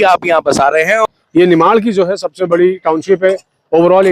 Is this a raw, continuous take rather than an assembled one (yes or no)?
no